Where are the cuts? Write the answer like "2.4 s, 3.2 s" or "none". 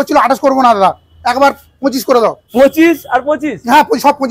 2.4 s